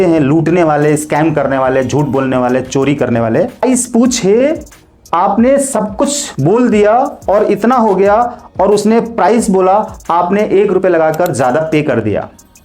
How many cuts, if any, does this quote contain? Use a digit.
1